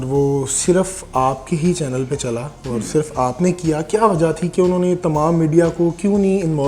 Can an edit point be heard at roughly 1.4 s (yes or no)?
no